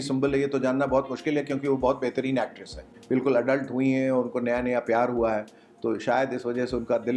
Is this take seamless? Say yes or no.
no